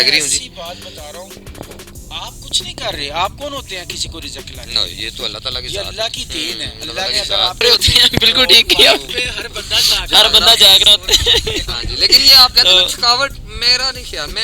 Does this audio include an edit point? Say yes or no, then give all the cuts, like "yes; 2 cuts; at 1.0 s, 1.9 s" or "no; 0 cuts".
yes; 1 cut; at 7.6 s